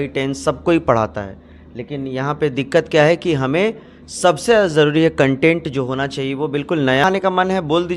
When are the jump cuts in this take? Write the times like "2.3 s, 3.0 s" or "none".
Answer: 7.0 s